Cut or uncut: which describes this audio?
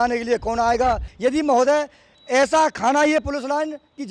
cut